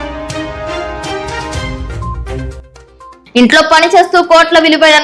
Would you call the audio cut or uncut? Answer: cut